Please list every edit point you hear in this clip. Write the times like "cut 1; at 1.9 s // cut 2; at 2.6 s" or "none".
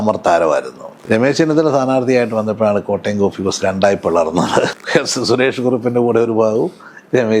cut 1; at 0.9 s // cut 2; at 4.7 s